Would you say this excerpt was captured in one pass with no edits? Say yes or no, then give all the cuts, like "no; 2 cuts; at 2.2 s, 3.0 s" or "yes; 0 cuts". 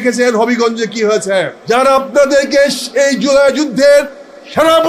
no; 1 cut; at 1.6 s